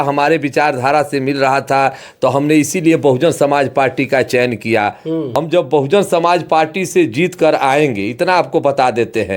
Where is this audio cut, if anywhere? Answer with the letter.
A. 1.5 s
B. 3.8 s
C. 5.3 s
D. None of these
C